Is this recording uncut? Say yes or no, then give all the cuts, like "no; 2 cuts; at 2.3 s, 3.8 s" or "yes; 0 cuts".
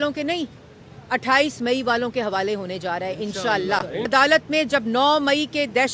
no; 1 cut; at 4.1 s